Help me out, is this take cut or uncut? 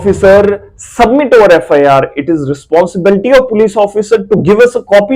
uncut